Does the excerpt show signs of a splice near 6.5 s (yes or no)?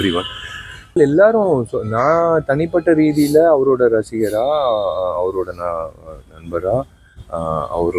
no